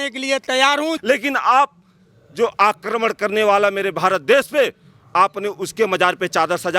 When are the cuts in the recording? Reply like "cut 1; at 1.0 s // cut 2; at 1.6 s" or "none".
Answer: cut 1; at 1.0 s